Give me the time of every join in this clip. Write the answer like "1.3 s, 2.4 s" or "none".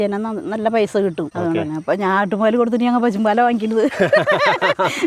1.3 s